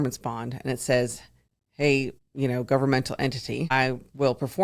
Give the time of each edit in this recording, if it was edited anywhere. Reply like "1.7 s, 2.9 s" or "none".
2.2 s, 3.7 s